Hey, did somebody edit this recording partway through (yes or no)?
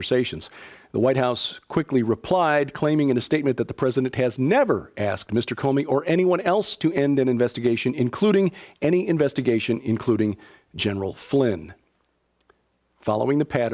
yes